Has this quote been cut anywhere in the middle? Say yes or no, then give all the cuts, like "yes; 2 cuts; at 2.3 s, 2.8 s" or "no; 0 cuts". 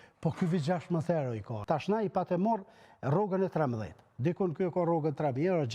yes; 1 cut; at 1.5 s